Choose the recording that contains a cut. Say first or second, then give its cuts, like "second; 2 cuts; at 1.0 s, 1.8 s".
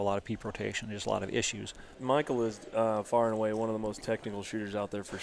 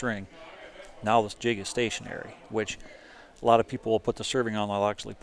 first; 1 cut; at 2.0 s